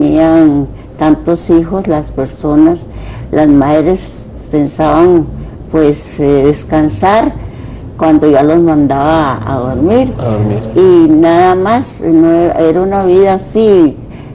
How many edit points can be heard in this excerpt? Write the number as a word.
zero